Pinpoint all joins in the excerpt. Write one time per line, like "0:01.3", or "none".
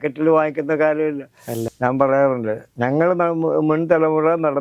0:01.5